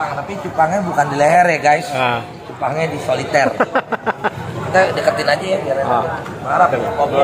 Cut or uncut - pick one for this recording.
cut